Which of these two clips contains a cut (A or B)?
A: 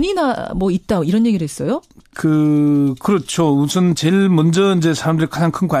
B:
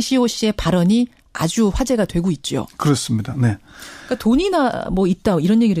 B